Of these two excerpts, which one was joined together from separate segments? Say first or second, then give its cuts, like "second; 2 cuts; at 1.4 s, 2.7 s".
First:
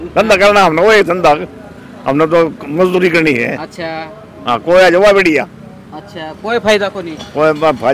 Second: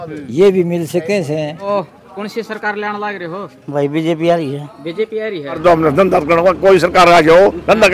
second; 2 cuts; at 1.7 s, 5.6 s